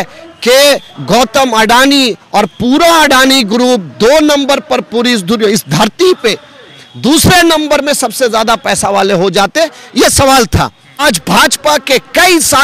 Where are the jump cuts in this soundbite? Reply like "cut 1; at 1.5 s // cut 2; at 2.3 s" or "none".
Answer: cut 1; at 11.0 s